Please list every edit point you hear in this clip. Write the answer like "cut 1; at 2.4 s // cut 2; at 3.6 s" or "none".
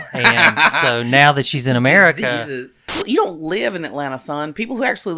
cut 1; at 3.0 s